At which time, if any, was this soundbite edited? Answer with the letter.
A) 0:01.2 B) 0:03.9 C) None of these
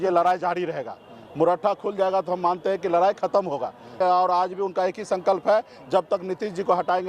B